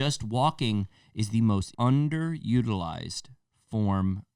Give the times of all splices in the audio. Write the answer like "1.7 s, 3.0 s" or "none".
1.7 s